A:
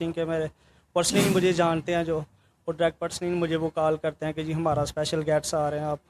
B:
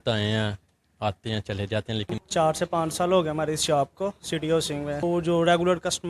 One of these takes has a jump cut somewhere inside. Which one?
B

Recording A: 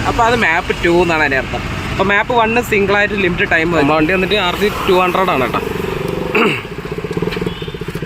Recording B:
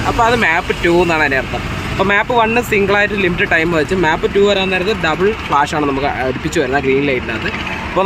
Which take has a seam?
A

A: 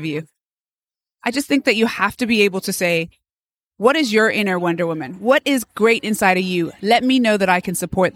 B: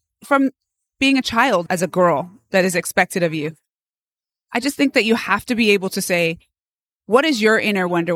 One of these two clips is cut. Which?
B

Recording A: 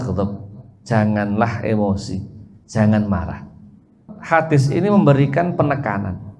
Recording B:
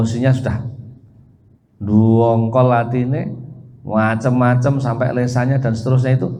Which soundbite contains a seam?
A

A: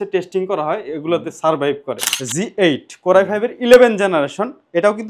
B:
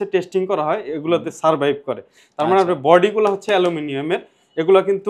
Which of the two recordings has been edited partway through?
A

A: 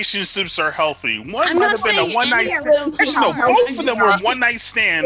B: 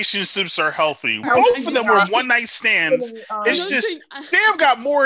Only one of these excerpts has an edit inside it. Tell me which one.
B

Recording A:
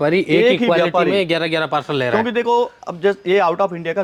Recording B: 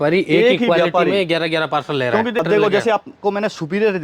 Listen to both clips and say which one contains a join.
B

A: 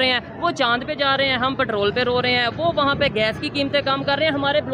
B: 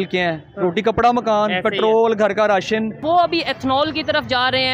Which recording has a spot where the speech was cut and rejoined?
B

